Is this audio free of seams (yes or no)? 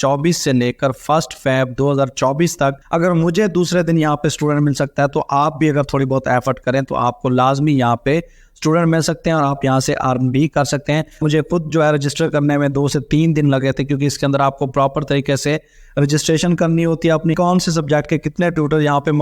no